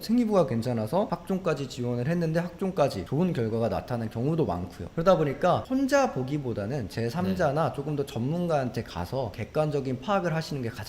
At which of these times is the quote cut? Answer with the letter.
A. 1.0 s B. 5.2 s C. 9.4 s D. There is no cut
C